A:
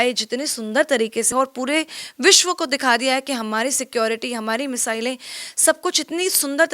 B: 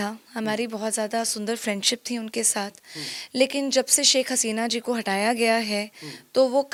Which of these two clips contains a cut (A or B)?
A